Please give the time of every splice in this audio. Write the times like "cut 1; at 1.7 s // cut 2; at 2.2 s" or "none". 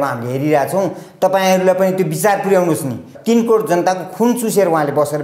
cut 1; at 3.1 s

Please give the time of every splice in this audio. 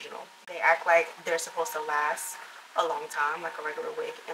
none

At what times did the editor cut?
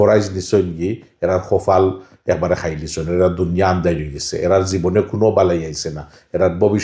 none

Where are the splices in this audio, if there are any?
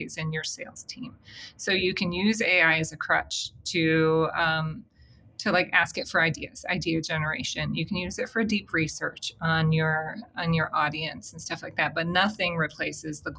none

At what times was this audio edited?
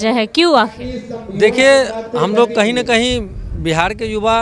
none

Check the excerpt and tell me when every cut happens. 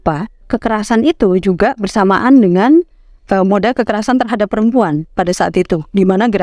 none

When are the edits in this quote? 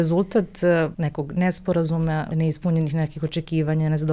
cut 1; at 0.9 s // cut 2; at 2.3 s

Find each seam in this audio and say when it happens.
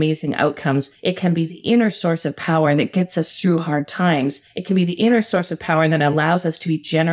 cut 1; at 0.9 s // cut 2; at 4.5 s

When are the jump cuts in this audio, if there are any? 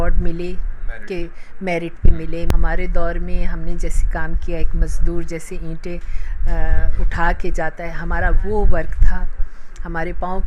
cut 1; at 2.5 s

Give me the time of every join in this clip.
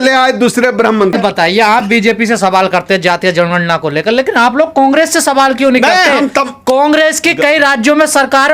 cut 1; at 1.1 s

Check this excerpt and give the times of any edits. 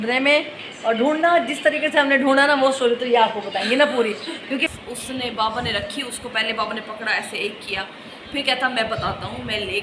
cut 1; at 4.7 s

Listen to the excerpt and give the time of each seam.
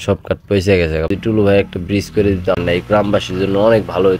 cut 1; at 1.1 s // cut 2; at 2.6 s

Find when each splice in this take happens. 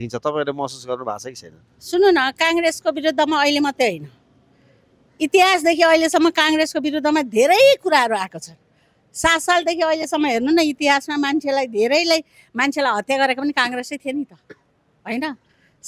none

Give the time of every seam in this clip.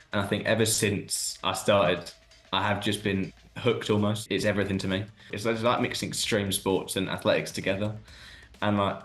cut 1; at 4.2 s // cut 2; at 5.2 s

